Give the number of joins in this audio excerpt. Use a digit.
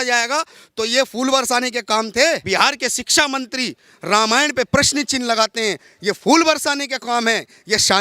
1